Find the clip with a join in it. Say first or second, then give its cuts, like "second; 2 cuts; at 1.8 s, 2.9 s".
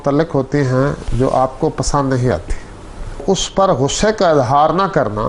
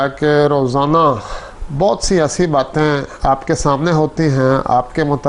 first; 1 cut; at 3.2 s